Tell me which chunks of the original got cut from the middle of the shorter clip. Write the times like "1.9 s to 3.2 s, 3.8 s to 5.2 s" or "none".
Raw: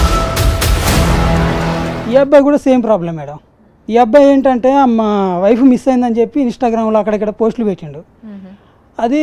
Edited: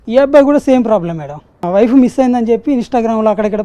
3.6 s to 5.3 s